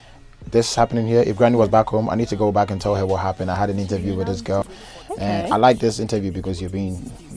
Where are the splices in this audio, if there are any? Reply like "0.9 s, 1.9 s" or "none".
4.6 s